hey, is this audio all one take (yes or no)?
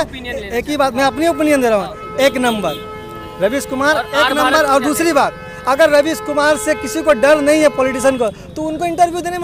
yes